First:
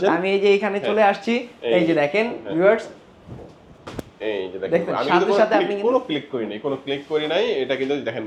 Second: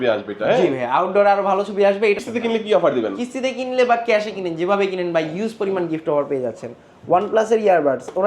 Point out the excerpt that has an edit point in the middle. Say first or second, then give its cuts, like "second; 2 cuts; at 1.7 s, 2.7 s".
second; 1 cut; at 2.2 s